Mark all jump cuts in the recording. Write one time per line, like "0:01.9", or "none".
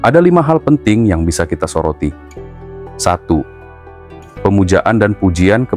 none